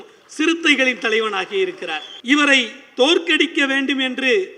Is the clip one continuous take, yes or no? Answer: no